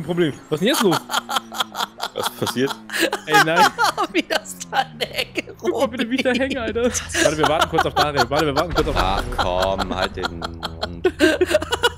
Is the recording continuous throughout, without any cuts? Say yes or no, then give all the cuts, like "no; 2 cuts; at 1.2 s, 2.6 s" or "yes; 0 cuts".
yes; 0 cuts